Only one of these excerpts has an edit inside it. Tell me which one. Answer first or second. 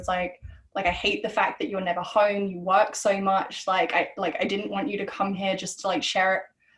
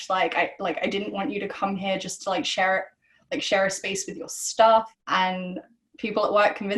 second